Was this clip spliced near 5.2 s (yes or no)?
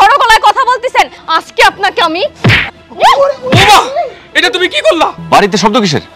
yes